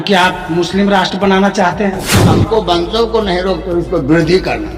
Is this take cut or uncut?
cut